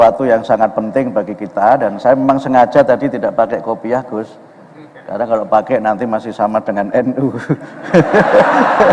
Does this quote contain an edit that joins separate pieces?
no; 0 cuts

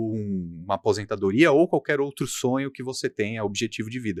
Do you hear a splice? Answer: no; 0 cuts

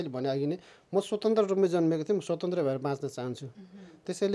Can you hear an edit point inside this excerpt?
no; 0 cuts

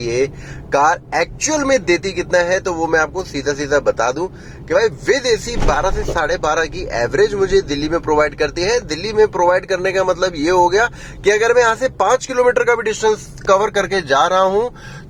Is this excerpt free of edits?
yes; 0 cuts

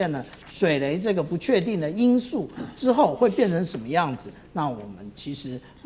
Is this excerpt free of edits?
yes; 0 cuts

